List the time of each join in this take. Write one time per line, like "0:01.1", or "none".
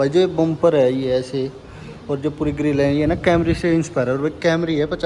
none

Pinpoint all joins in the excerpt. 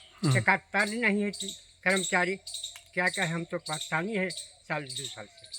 none

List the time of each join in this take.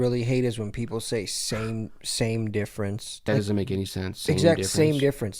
0:03.2

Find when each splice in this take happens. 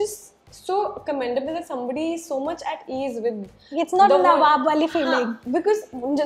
none

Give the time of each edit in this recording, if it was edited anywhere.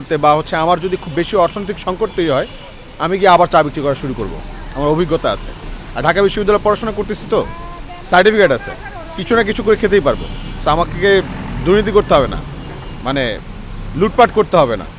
none

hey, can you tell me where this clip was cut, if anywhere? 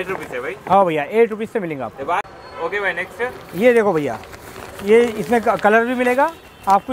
0:02.3

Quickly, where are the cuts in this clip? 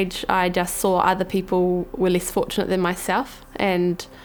none

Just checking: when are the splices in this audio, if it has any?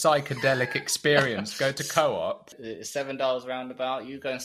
0:02.5

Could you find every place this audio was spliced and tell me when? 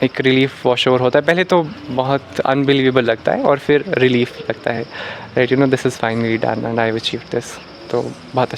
none

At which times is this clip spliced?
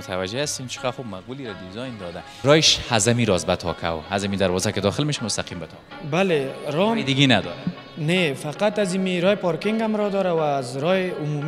0:02.4

